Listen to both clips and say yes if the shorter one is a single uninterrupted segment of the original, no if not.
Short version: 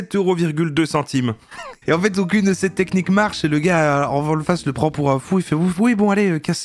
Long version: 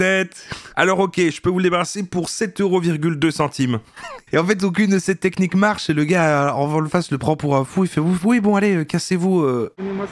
yes